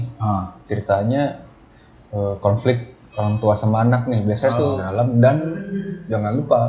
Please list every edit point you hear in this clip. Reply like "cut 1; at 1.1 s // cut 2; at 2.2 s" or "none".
cut 1; at 4.7 s